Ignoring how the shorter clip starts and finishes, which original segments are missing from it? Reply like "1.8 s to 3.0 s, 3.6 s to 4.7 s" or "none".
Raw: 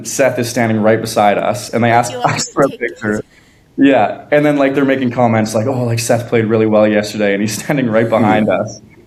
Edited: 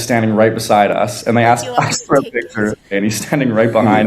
3.4 s to 7.3 s